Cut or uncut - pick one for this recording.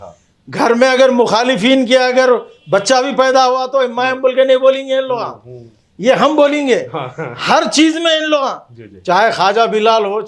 uncut